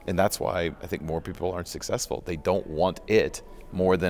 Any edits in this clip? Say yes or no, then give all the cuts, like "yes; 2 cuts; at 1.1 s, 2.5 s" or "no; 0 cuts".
no; 0 cuts